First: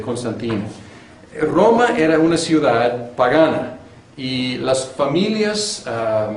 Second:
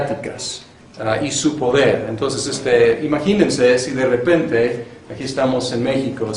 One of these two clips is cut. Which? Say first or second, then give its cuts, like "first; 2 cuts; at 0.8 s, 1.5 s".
first; 1 cut; at 5.4 s